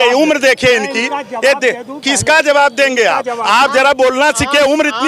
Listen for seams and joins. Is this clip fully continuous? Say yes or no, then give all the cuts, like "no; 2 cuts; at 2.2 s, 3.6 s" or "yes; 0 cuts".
yes; 0 cuts